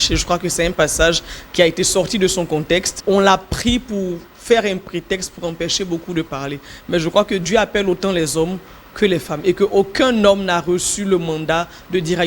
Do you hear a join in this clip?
yes; 1 cut; at 2.9 s

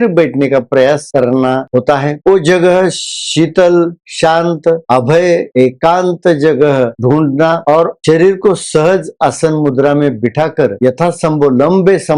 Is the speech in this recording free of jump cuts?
yes; 0 cuts

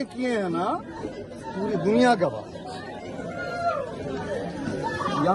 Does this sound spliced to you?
no; 0 cuts

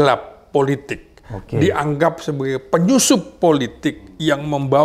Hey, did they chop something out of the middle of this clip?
no; 0 cuts

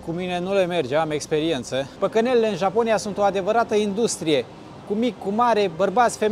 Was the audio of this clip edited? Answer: yes; 1 cut; at 1.9 s

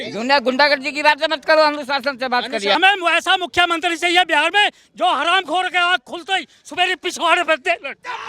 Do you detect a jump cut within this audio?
yes; 1 cut; at 2.8 s

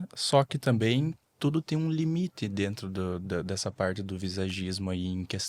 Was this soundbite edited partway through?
no; 0 cuts

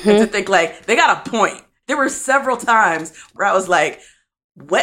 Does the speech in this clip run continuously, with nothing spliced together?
no; 2 cuts; at 1.8 s, 3.3 s

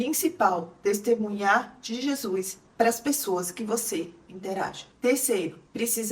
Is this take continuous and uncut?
yes; 0 cuts

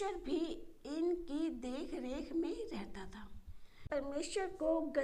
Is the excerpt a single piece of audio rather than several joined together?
no; 1 cut; at 3.8 s

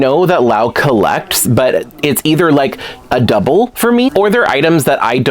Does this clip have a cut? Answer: yes; 1 cut; at 4.1 s

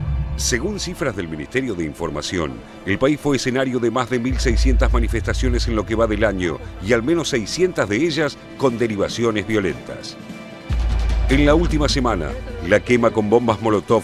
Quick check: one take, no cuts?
yes; 0 cuts

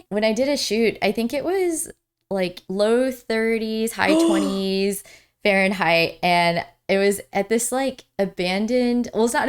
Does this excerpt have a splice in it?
no; 0 cuts

